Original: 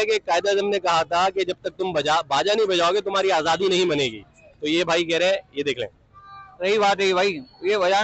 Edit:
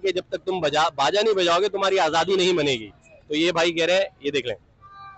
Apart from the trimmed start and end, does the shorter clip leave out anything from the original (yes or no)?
no